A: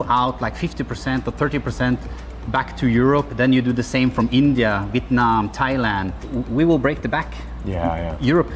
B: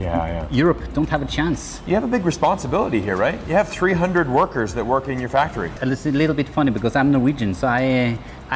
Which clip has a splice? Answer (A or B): B